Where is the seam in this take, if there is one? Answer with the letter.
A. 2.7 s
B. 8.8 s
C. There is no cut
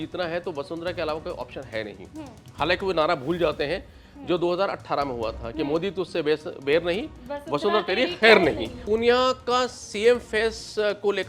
B